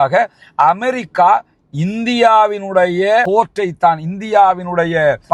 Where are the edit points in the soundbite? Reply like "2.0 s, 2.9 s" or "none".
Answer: none